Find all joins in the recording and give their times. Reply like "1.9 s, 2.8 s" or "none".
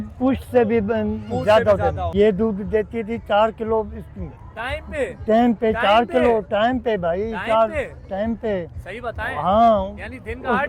2.1 s